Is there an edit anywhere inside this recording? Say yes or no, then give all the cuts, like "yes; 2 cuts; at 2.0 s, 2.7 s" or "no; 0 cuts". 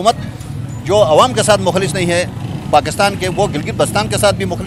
no; 0 cuts